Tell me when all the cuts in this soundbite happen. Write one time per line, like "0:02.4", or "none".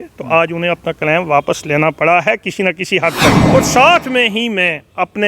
0:03.4

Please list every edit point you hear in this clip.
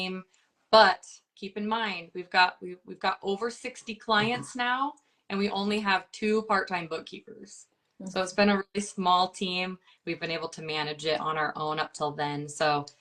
none

